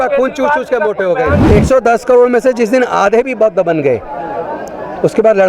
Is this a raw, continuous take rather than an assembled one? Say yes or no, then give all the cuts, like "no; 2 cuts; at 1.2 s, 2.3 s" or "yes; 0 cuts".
no; 1 cut; at 1.4 s